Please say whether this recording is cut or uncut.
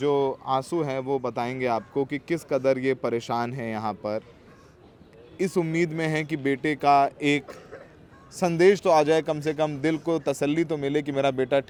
uncut